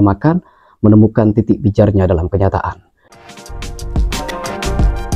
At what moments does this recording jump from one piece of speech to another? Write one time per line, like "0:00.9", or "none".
0:03.0